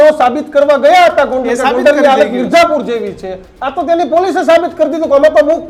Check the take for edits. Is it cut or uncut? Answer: uncut